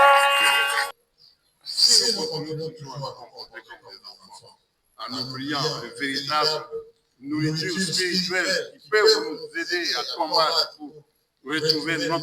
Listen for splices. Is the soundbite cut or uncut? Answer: cut